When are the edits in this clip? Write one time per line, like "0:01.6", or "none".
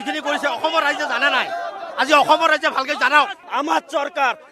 0:03.4